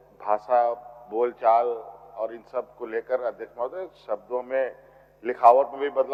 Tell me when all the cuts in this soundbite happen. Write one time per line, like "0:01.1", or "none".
none